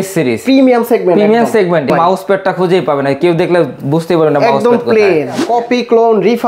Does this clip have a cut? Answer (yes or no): yes